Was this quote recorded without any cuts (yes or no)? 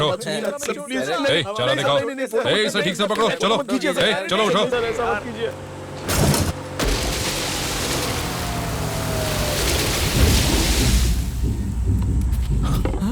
no